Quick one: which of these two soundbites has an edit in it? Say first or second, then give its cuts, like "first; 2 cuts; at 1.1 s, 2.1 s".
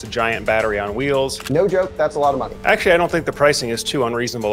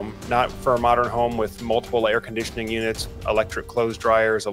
first; 2 cuts; at 1.4 s, 2.5 s